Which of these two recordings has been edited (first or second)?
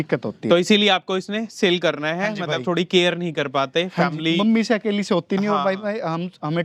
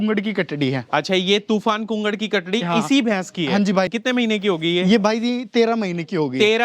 second